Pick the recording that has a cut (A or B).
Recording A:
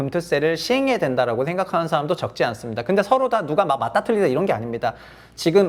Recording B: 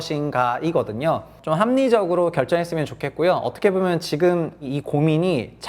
B